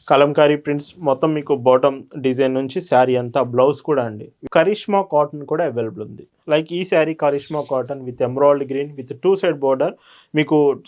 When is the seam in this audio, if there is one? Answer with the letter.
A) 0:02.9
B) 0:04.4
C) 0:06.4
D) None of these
B